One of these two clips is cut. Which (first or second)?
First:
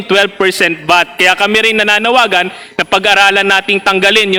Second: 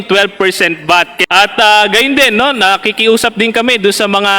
second